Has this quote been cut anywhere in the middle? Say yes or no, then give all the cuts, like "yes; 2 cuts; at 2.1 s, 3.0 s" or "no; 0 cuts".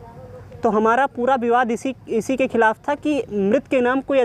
no; 0 cuts